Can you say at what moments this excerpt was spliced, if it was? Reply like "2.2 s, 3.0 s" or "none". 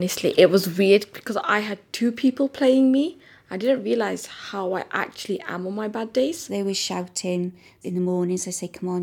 6.4 s, 7.8 s